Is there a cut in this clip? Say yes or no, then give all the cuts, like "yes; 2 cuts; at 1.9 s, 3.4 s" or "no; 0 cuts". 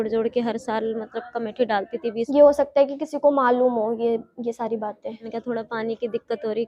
yes; 2 cuts; at 2.3 s, 5.3 s